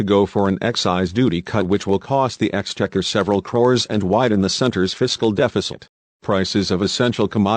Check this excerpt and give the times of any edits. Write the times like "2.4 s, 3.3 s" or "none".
6.2 s